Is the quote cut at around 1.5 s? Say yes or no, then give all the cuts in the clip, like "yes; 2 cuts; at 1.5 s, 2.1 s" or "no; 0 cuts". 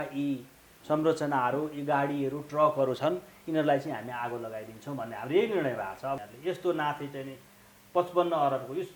no; 1 cut; at 6.2 s